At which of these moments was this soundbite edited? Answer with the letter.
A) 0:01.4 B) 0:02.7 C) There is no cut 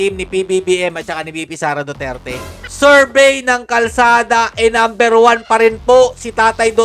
B